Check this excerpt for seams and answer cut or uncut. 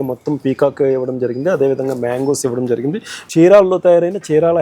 cut